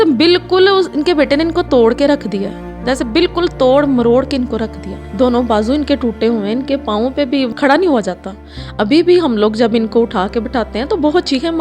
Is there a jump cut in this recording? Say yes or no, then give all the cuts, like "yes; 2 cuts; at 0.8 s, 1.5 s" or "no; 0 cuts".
yes; 1 cut; at 7.5 s